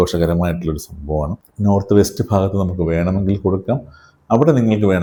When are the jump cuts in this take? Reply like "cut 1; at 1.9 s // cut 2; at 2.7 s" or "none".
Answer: none